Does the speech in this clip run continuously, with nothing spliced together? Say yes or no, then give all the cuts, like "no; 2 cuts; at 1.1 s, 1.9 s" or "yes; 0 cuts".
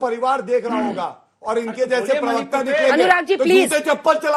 yes; 0 cuts